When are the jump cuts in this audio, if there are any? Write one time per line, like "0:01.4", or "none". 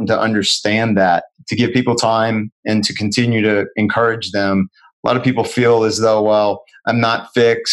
0:01.3